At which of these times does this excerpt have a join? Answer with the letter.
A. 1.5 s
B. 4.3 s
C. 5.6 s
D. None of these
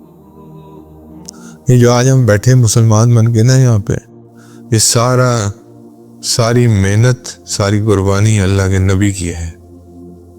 A